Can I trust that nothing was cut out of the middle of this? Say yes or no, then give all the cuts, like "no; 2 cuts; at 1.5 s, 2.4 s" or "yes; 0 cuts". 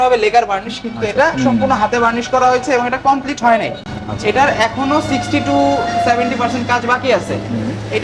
yes; 0 cuts